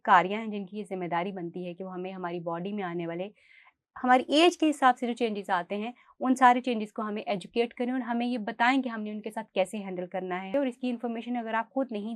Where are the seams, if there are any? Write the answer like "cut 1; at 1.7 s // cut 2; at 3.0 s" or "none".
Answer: cut 1; at 10.5 s